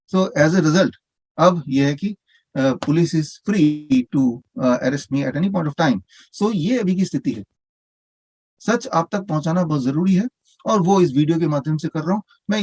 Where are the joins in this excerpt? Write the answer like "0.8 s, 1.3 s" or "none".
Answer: 7.9 s